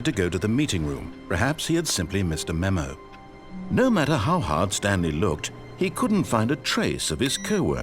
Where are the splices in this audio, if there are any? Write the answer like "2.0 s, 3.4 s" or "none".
3.3 s